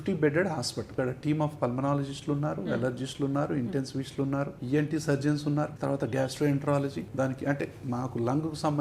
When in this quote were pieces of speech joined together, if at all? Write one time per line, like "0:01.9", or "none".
0:00.9